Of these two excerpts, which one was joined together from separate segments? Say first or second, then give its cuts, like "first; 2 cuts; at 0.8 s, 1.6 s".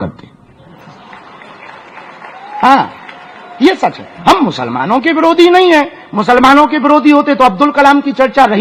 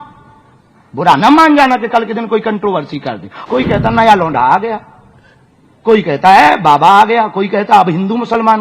second; 1 cut; at 3.3 s